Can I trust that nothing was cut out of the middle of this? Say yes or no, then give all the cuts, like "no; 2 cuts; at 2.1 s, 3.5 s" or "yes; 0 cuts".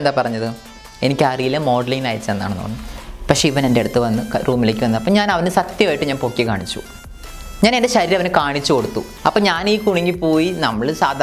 no; 1 cut; at 9.0 s